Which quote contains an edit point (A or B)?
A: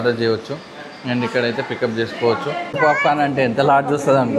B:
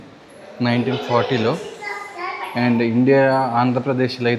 A